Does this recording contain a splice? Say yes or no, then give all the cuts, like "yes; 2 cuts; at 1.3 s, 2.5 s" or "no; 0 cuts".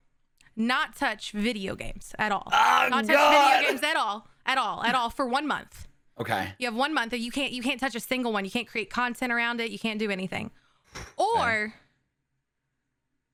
no; 0 cuts